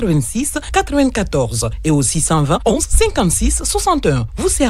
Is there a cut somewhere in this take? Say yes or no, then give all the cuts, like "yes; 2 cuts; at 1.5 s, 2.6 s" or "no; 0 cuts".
yes; 1 cut; at 2.7 s